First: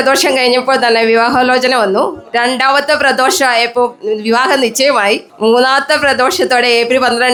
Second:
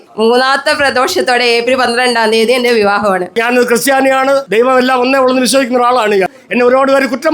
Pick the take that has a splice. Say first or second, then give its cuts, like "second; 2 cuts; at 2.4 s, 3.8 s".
second; 3 cuts; at 3.4 s, 4.5 s, 6.4 s